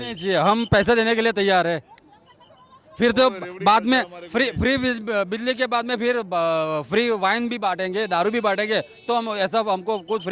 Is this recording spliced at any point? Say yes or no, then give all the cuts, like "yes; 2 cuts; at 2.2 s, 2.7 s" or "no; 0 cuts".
no; 0 cuts